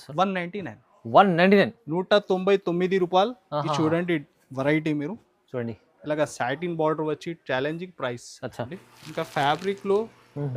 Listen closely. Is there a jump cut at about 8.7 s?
yes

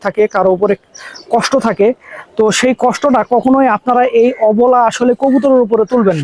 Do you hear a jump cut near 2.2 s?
no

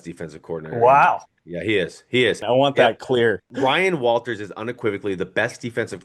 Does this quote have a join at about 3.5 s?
yes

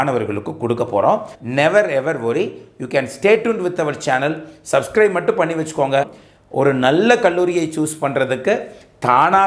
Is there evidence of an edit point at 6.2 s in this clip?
yes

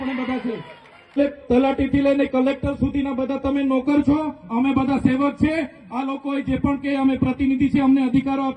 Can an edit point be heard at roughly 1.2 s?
yes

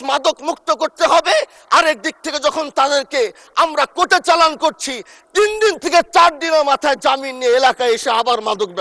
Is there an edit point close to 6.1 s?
no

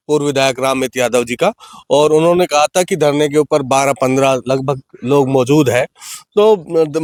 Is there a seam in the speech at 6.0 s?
no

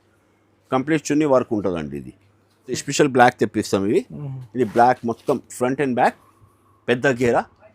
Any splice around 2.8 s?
yes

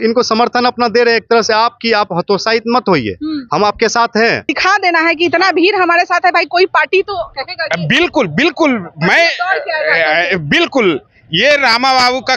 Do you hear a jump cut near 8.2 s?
no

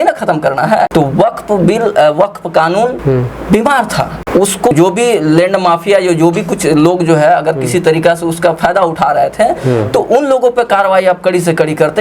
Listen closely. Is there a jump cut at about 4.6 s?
yes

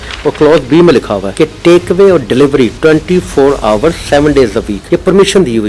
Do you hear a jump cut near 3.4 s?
no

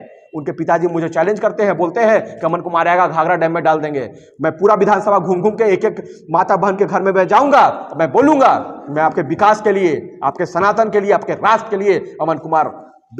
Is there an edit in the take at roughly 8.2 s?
no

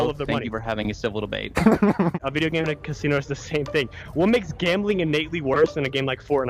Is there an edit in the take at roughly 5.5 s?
no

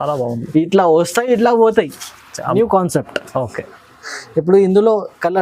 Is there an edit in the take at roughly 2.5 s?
yes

